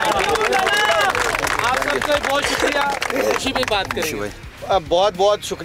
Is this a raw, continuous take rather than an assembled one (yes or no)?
yes